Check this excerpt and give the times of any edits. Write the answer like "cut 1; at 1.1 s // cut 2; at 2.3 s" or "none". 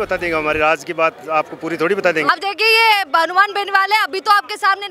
cut 1; at 2.3 s

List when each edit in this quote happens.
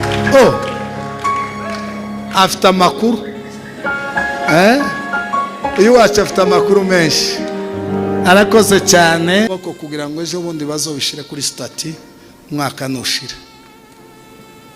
cut 1; at 9.5 s

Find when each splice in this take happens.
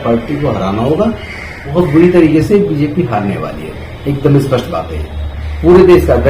cut 1; at 1.6 s

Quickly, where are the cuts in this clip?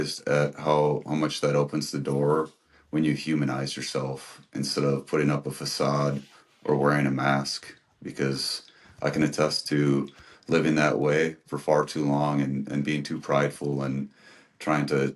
none

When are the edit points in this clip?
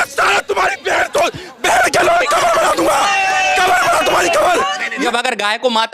cut 1; at 5.0 s

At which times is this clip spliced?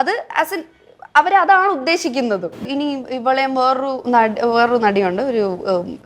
cut 1; at 2.7 s

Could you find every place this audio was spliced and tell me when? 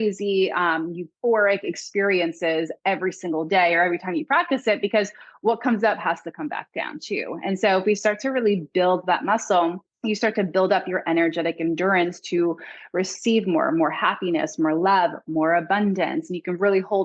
cut 1; at 9.9 s

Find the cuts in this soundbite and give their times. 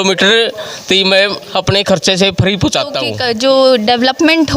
cut 1; at 3.1 s

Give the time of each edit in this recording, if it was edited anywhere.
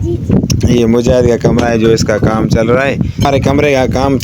cut 1; at 3.2 s

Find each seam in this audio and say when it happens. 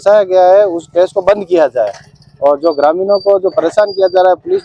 none

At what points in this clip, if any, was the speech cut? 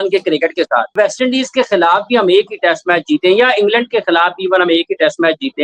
cut 1; at 0.9 s

